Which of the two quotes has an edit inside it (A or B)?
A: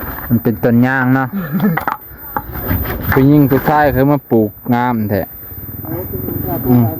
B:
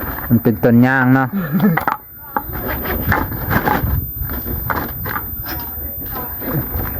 A